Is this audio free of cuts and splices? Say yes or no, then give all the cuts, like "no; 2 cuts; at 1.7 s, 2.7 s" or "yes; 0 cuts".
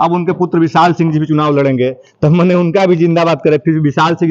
yes; 0 cuts